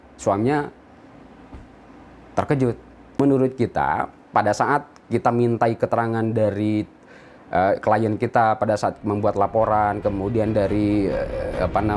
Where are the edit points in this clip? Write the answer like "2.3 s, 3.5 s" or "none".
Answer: 3.0 s